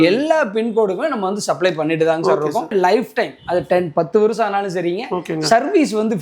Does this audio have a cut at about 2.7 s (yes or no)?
yes